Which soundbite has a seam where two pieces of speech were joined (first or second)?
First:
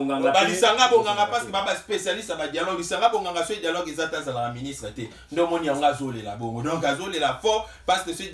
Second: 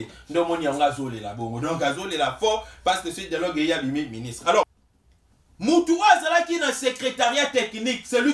second